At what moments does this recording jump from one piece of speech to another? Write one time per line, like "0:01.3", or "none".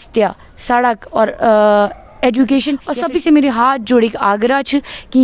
0:03.0